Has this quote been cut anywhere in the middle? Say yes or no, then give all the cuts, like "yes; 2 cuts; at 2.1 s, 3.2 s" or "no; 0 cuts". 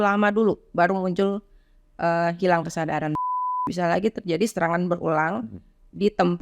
yes; 1 cut; at 3.2 s